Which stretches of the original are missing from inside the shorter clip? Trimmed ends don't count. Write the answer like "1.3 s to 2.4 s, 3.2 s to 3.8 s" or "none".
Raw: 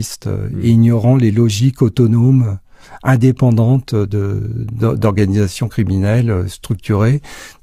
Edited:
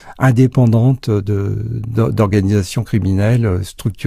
none